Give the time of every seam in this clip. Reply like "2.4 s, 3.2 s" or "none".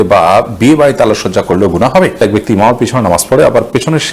2.2 s

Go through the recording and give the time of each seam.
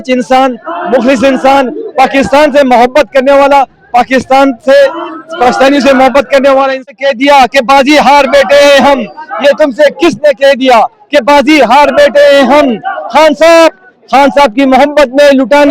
6.9 s

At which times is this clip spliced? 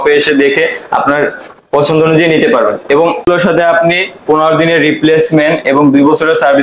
3.3 s

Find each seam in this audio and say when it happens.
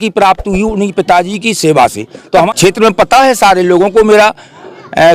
2.5 s

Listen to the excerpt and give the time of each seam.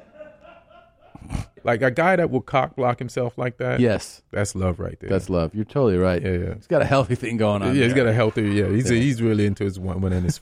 1.6 s

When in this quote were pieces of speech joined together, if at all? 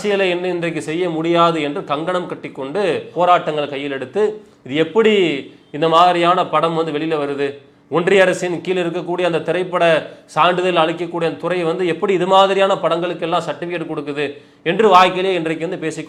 none

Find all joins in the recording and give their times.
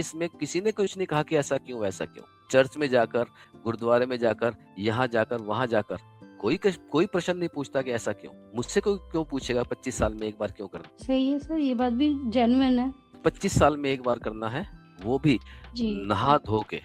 13.1 s

